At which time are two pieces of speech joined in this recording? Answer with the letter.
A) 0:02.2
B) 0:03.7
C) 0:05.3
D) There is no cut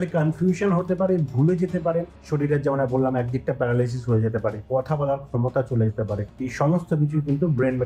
A